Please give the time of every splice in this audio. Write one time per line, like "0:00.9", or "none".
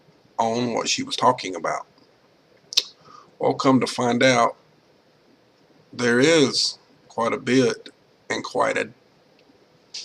0:01.9